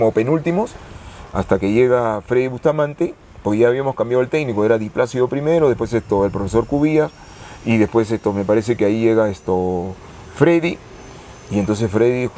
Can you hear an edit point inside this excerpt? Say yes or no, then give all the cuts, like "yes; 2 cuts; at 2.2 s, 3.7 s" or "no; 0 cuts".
no; 0 cuts